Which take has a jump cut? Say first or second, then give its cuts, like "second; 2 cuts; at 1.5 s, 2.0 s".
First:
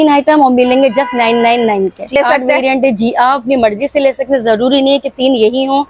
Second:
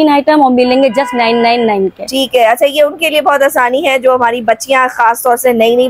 first; 1 cut; at 2.2 s